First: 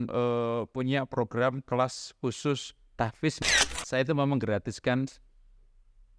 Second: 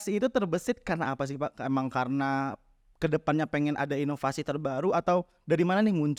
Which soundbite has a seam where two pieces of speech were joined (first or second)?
first